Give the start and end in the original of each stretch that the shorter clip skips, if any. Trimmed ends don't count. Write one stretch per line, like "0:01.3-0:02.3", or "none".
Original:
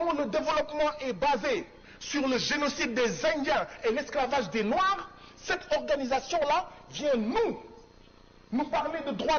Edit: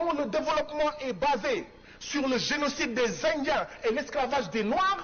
none